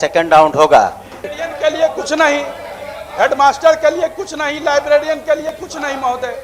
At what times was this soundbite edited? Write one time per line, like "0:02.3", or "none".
0:01.1